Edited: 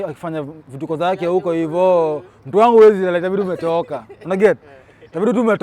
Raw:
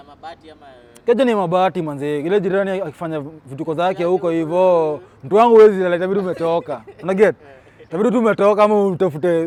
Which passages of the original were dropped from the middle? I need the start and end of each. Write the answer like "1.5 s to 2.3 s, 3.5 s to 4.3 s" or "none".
none